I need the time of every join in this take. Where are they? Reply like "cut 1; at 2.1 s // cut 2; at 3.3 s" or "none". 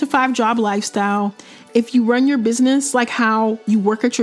cut 1; at 1.5 s